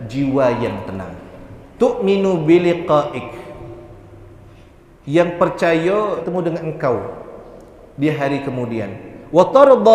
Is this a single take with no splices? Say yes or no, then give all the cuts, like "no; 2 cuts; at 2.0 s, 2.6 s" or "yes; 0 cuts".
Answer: no; 1 cut; at 6.3 s